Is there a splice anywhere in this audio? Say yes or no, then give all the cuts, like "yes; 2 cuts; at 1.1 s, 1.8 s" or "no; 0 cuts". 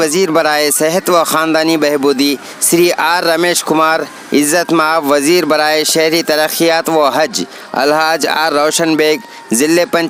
no; 0 cuts